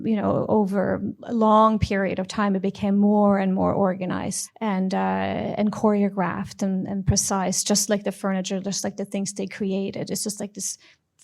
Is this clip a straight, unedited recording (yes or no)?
no